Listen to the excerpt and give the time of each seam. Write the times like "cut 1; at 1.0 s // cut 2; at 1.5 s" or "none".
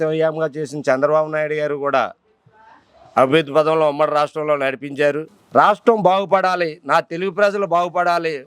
cut 1; at 5.3 s

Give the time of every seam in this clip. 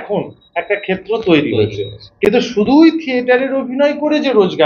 none

